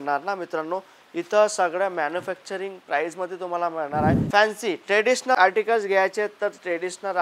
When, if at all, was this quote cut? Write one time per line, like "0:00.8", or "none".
0:04.2